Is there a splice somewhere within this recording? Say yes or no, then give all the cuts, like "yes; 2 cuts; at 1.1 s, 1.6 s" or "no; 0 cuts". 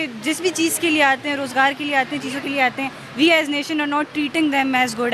no; 0 cuts